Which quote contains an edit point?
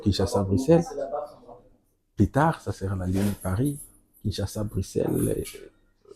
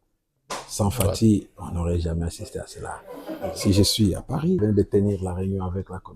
second; 2 cuts; at 3.3 s, 4.6 s

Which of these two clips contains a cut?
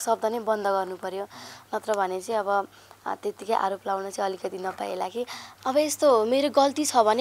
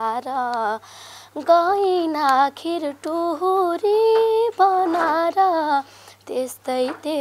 first; 1 cut; at 5.4 s

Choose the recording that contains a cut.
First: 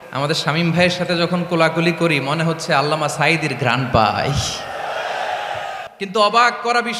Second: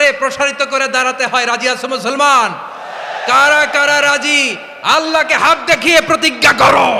first; 1 cut; at 5.9 s

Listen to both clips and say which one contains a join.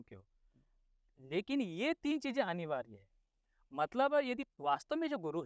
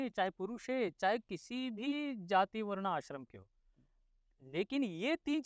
first; 1 cut; at 4.5 s

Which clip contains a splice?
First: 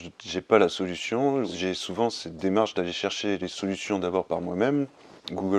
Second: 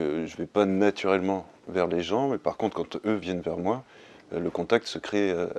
first; 1 cut; at 1.5 s

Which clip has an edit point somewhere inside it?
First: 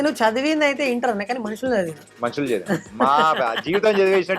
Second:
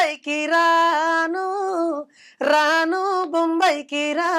first; 1 cut; at 2.0 s

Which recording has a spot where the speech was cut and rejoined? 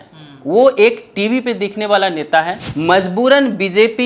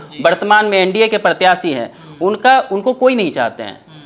first; 1 cut; at 2.7 s

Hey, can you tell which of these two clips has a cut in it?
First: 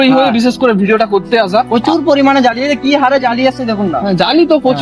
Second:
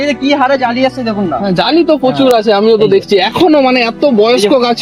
first; 1 cut; at 1.7 s

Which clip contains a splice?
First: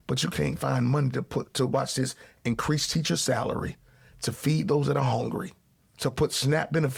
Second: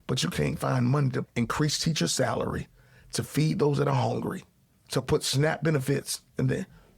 second; 1 cut; at 1.3 s

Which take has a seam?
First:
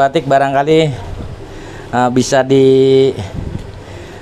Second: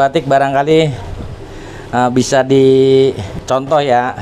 second; 1 cut; at 3.3 s

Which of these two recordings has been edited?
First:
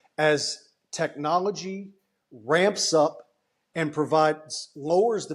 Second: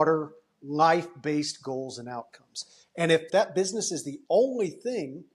second; 1 cut; at 3.2 s

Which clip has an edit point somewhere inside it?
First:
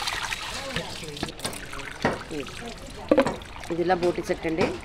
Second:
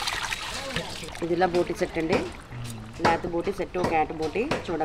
second; 1 cut; at 1.0 s

